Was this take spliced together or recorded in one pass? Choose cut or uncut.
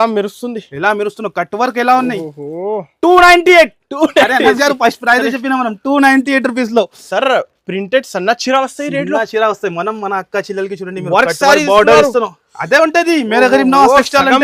uncut